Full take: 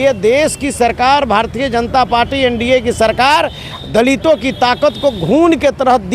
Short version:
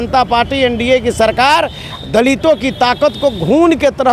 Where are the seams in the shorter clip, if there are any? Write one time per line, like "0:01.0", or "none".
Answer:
none